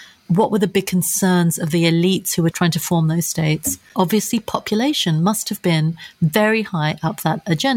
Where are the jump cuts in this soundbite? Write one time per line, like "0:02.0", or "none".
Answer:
0:02.5
0:03.8